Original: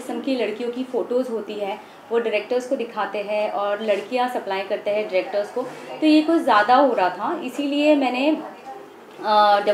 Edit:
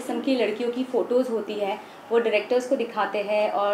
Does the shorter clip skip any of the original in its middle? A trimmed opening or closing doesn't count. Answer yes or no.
no